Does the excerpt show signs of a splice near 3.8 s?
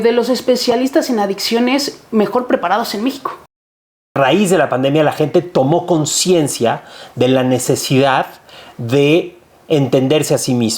yes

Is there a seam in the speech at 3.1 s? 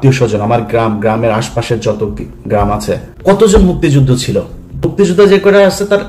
yes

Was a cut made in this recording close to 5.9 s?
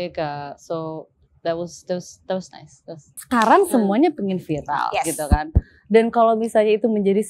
no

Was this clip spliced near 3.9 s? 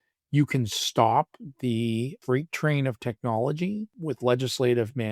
yes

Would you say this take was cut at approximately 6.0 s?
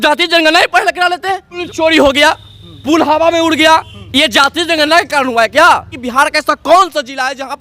yes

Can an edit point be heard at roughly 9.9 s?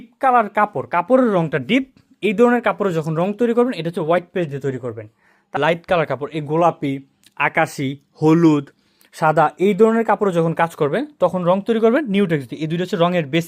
no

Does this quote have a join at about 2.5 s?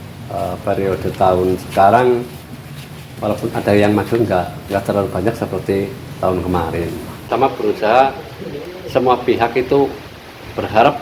no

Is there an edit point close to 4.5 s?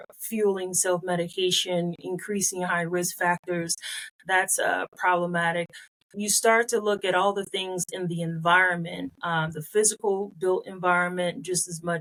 no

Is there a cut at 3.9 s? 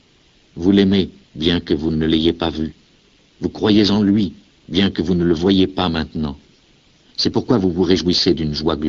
no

